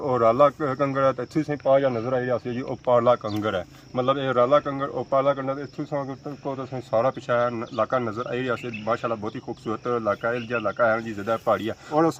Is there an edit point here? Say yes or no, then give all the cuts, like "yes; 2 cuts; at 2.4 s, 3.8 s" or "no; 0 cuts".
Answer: no; 0 cuts